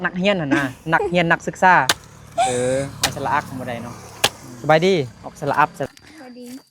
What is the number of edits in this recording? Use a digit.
3